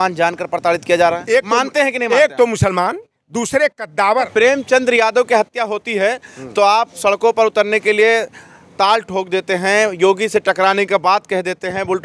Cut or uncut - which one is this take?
cut